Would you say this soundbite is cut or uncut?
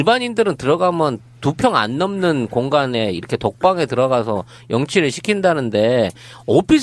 cut